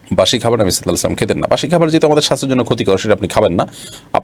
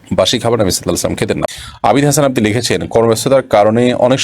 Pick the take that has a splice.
second; 1 cut; at 1.5 s

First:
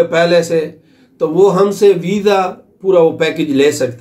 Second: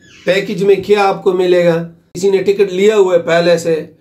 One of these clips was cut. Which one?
second; 1 cut; at 2.0 s

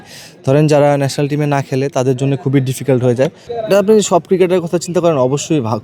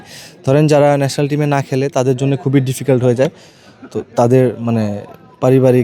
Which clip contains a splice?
first; 1 cut; at 3.5 s

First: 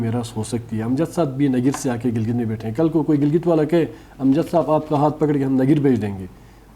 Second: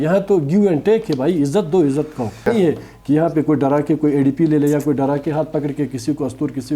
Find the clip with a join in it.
second; 1 cut; at 2.4 s

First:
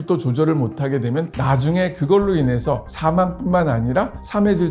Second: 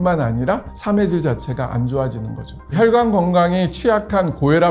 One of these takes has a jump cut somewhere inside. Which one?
second; 1 cut; at 2.7 s

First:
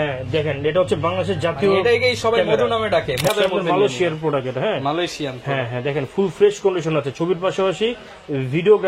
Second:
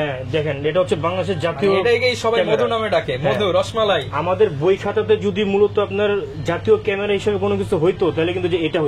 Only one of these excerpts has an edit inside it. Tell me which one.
first; 1 cut; at 3.3 s

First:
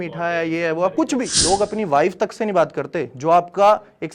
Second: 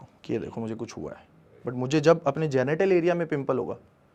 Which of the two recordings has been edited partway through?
first; 1 cut; at 1.3 s

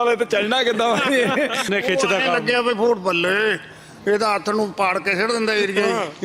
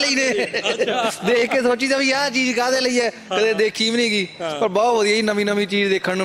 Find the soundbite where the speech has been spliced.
first; 1 cut; at 1.7 s

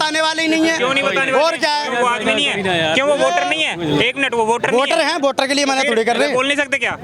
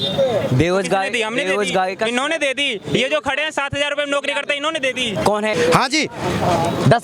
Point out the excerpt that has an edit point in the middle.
second; 1 cut; at 5.5 s

